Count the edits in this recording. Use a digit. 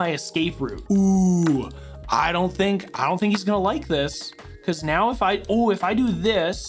0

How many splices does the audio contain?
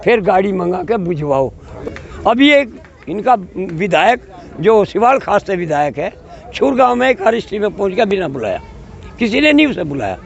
1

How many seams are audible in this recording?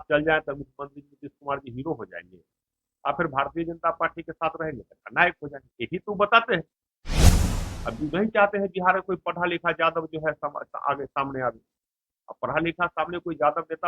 1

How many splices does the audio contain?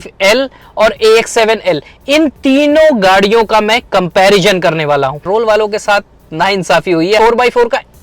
2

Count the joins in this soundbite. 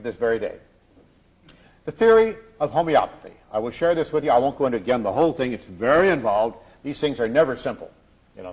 0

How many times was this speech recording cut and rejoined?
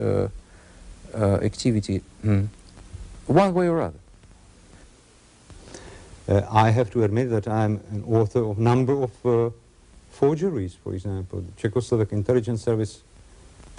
1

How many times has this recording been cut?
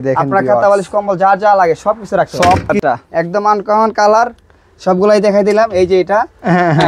1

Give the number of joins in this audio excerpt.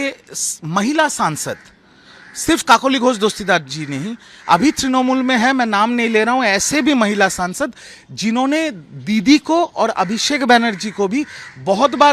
0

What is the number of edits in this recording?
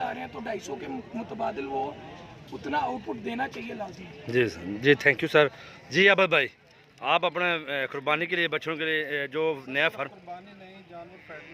0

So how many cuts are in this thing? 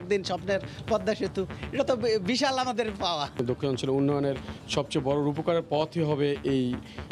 1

